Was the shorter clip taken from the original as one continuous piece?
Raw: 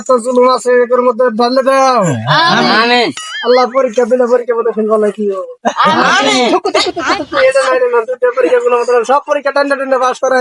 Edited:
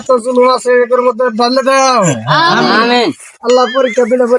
yes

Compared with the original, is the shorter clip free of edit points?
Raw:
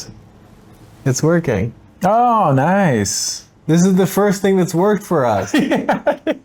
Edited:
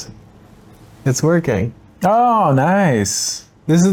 yes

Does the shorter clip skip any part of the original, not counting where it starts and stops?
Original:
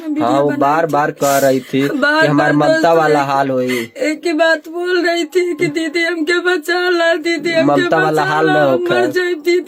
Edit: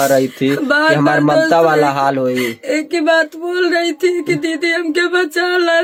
no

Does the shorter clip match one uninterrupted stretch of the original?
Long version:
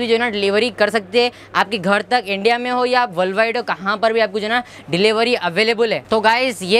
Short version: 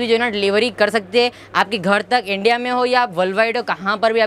yes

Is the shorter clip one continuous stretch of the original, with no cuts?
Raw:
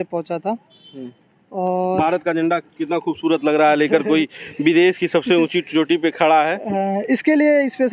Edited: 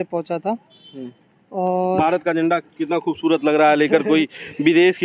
yes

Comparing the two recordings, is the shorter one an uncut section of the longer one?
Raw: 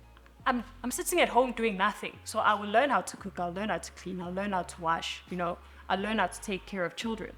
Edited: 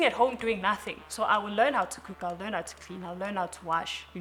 yes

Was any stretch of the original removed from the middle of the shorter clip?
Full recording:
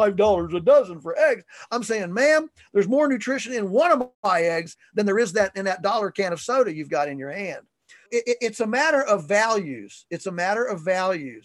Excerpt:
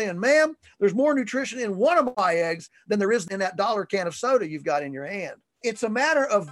yes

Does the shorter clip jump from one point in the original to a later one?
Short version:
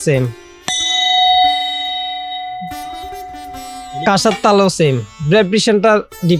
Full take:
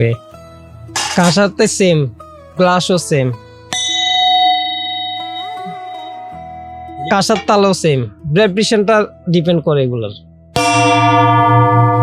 no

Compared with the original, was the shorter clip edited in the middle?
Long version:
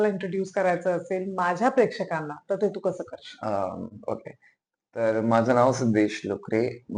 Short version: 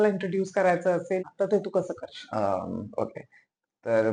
yes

